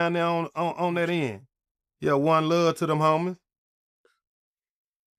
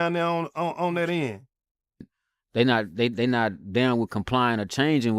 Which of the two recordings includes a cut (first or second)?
second